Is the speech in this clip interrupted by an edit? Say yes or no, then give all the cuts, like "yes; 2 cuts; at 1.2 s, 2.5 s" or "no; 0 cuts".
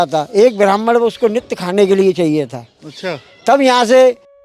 no; 0 cuts